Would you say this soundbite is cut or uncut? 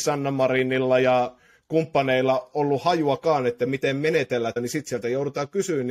cut